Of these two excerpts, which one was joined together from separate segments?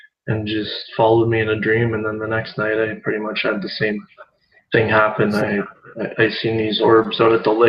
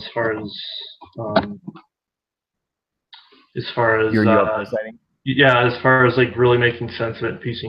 first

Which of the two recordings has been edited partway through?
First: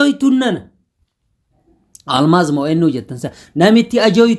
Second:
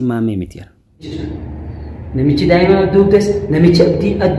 second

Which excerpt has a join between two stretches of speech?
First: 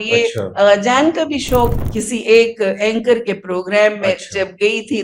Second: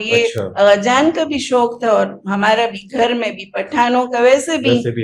first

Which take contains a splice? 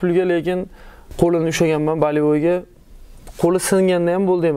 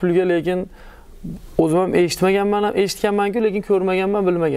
first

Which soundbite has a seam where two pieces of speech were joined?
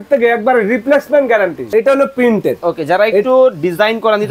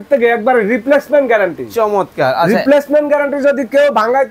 first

